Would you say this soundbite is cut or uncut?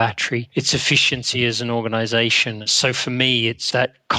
cut